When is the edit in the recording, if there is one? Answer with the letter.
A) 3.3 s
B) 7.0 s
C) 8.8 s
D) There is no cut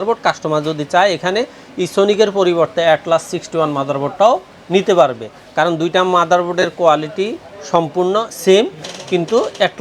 D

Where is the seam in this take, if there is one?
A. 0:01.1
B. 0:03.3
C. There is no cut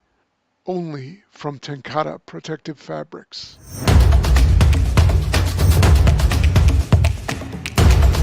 B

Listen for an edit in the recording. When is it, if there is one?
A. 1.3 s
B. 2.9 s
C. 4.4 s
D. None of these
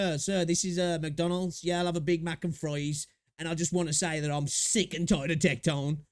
D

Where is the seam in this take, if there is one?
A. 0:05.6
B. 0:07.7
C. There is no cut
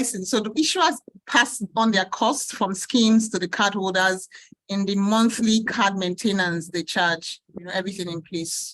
B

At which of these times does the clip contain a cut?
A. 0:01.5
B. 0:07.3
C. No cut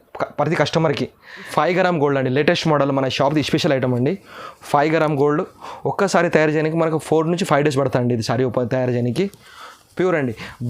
A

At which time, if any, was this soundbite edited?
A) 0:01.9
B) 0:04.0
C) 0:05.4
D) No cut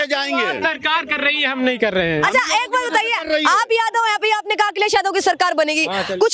D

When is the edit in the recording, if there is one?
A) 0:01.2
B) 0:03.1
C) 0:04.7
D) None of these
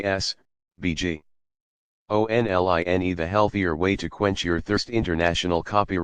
B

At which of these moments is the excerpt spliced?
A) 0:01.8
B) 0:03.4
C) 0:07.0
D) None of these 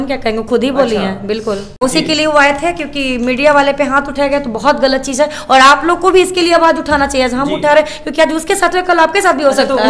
A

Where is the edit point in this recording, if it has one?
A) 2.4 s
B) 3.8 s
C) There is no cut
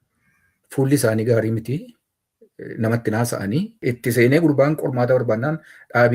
B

